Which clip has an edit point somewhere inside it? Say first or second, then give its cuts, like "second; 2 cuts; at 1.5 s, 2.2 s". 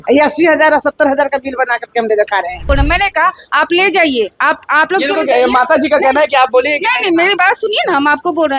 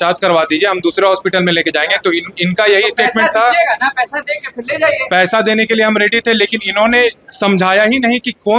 first; 1 cut; at 2.7 s